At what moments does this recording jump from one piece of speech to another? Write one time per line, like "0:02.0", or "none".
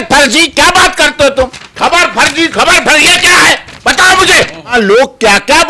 0:04.7